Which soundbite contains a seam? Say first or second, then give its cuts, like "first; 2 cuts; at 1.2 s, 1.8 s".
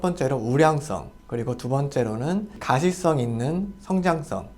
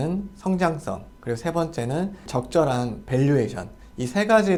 first; 1 cut; at 2.5 s